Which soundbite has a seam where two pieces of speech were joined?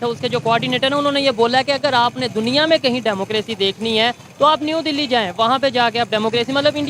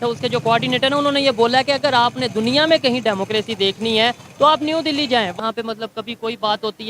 second; 1 cut; at 5.3 s

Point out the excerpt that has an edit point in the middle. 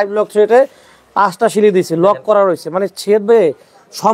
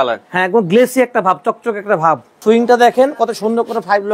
second; 1 cut; at 2.4 s

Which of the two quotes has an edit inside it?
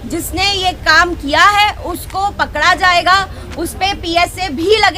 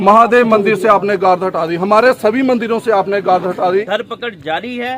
second; 1 cut; at 3.9 s

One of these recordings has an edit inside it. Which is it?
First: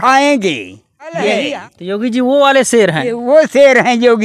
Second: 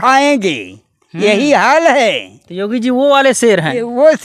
first; 1 cut; at 1.4 s

